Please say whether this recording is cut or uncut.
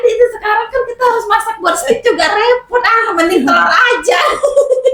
uncut